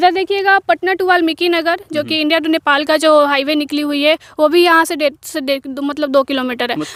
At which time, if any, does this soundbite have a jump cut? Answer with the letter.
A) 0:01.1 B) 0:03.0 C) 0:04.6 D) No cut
D